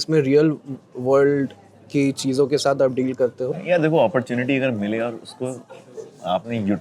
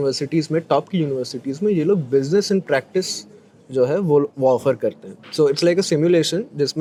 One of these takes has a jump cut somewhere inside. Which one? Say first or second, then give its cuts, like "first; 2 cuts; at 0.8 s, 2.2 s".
first; 1 cut; at 3.6 s